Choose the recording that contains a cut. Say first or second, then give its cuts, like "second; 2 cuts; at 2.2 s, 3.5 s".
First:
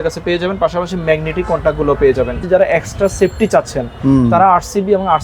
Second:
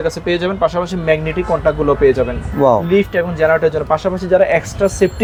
first; 1 cut; at 2.4 s